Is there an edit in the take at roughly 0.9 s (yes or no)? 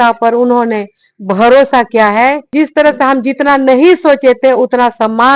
no